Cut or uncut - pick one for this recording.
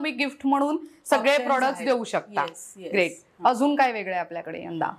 uncut